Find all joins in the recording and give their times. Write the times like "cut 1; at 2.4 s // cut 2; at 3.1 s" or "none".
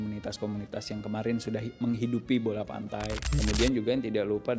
cut 1; at 3.3 s